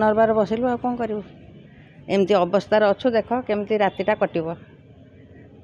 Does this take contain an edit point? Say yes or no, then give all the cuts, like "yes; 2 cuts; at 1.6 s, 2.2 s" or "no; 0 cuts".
no; 0 cuts